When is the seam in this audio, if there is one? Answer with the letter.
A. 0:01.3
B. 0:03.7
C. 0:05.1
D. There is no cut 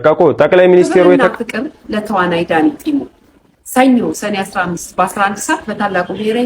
A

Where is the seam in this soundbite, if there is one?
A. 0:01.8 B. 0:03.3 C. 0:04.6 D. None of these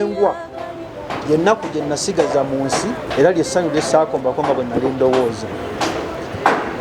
D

